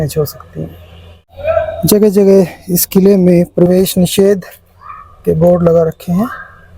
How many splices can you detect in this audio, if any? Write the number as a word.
one